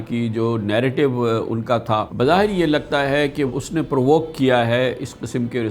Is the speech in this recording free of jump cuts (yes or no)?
no